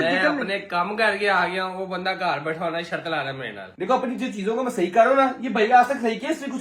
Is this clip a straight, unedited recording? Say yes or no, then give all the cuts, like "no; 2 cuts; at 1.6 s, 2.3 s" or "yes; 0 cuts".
no; 1 cut; at 3.6 s